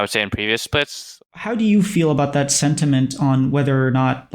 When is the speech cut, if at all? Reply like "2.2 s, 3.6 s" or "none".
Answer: 1.2 s